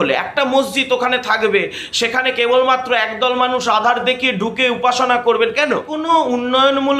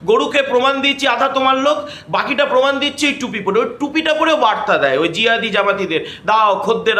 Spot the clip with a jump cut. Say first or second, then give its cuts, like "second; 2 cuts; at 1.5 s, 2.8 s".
first; 1 cut; at 5.9 s